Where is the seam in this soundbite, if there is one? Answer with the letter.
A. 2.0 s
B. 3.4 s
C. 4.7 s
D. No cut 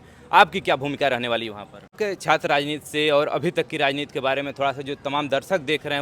A